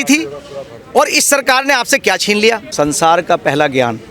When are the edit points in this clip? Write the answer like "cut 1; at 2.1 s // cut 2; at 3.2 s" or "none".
cut 1; at 2.7 s